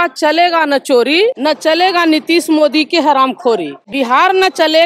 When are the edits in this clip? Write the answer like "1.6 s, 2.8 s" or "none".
1.4 s, 3.9 s